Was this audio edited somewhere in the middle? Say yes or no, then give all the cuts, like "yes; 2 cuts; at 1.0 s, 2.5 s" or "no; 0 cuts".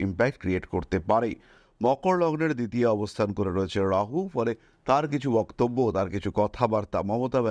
yes; 1 cut; at 1.6 s